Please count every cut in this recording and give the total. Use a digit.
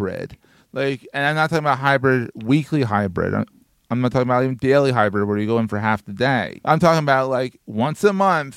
1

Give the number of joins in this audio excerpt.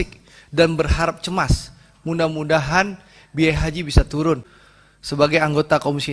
1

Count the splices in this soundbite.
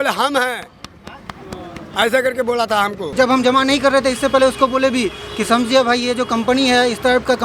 1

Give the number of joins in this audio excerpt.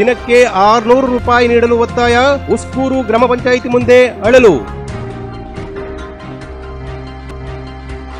0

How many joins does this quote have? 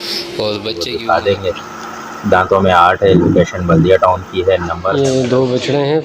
2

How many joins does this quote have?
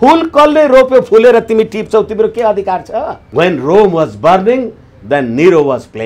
1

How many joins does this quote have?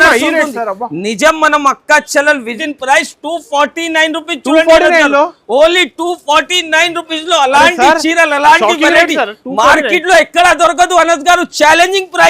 1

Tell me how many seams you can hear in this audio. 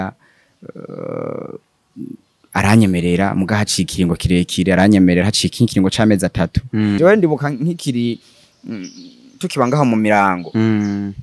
1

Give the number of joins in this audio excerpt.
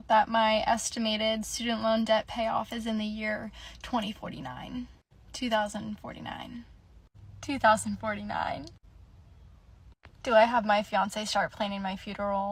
0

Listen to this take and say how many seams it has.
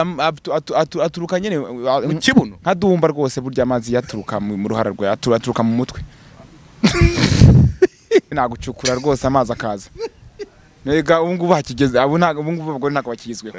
1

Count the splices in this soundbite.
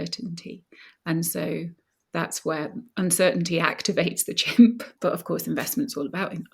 1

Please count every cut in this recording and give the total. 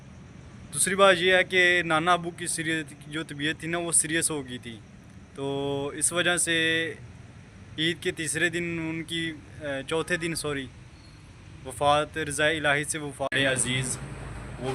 1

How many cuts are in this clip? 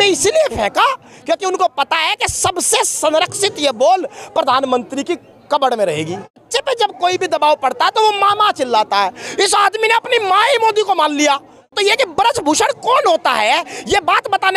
2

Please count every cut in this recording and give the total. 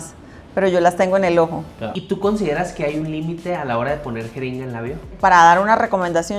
2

